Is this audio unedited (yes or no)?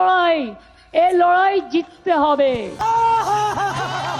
no